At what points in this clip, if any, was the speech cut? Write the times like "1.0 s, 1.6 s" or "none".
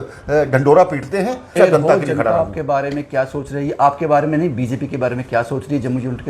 1.5 s